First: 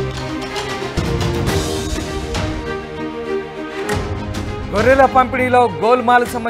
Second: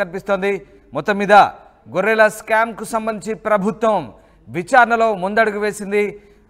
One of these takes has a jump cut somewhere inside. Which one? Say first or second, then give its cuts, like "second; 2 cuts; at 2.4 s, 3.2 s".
first; 1 cut; at 1.0 s